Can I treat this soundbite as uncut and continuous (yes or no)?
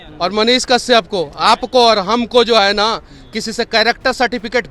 yes